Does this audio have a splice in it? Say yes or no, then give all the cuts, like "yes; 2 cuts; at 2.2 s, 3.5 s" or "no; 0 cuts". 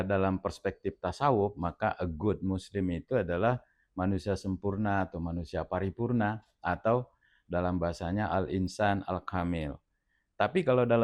no; 0 cuts